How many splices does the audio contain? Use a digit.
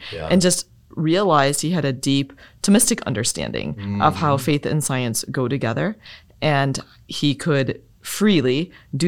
0